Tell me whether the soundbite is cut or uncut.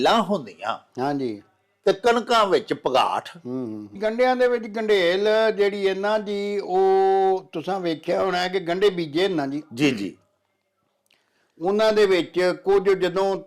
cut